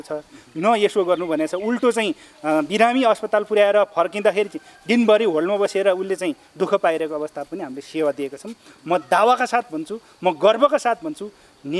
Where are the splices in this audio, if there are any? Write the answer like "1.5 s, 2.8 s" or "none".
none